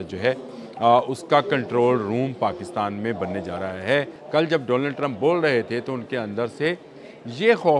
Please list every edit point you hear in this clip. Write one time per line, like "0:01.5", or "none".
0:04.2

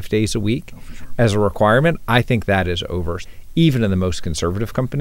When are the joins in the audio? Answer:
0:03.2

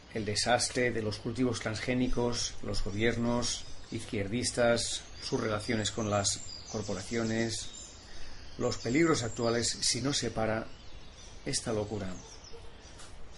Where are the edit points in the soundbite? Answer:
0:08.8

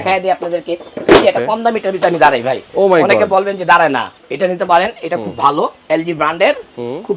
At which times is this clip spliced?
0:04.1
0:05.8

